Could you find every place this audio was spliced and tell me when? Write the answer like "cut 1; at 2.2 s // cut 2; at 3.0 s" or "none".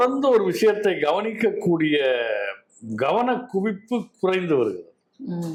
none